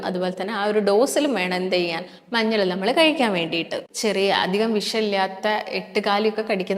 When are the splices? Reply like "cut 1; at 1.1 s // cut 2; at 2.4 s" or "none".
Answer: cut 1; at 3.8 s